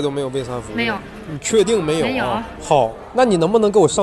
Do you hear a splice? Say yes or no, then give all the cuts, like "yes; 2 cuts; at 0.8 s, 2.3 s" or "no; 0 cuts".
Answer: yes; 2 cuts; at 0.8 s, 2.2 s